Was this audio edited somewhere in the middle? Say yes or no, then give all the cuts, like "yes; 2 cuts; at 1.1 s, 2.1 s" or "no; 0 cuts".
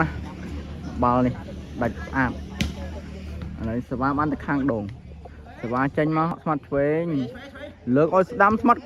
yes; 1 cut; at 6.3 s